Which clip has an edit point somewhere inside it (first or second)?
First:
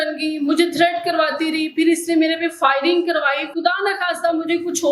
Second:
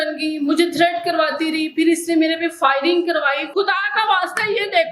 second